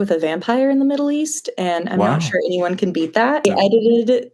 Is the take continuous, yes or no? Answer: no